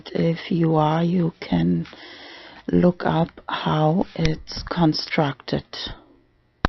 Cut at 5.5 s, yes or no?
no